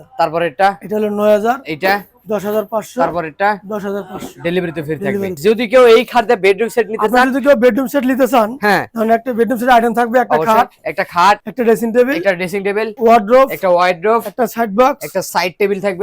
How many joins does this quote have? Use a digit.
3